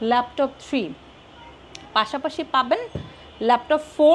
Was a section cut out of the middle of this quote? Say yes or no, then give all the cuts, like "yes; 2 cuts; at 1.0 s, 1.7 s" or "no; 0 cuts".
no; 0 cuts